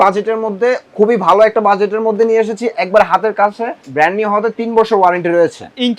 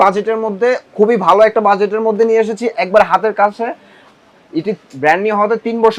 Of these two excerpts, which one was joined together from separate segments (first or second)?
first